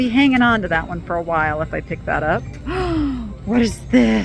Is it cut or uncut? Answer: uncut